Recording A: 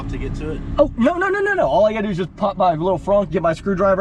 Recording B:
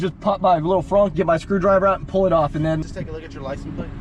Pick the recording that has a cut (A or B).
B